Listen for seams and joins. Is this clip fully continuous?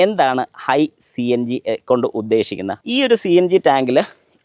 no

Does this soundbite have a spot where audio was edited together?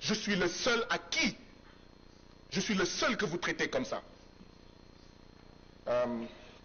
no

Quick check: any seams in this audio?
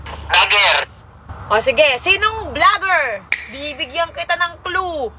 no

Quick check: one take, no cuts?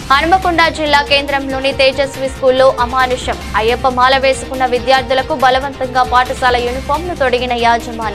yes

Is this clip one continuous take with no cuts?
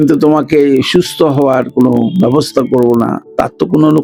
yes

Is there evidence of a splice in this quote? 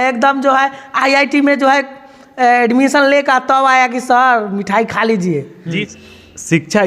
yes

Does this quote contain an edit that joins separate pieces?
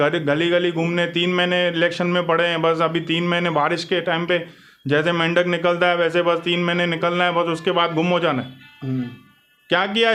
no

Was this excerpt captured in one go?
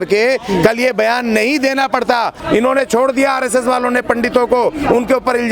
no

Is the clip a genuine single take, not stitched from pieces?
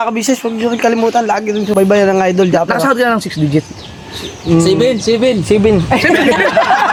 yes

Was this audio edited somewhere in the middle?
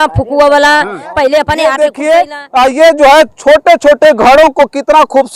yes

